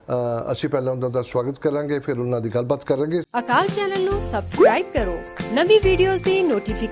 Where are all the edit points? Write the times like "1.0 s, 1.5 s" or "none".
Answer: 3.2 s